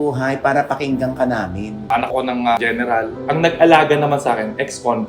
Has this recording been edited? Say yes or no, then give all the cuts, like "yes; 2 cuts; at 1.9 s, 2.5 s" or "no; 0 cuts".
yes; 2 cuts; at 2.1 s, 3.2 s